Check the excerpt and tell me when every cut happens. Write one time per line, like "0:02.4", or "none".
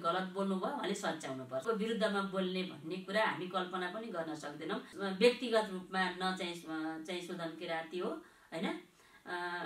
0:01.6
0:04.9